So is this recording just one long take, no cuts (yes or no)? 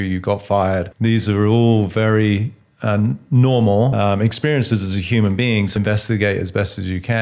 no